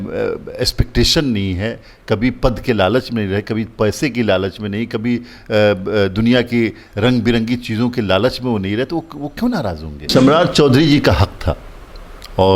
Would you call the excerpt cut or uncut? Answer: cut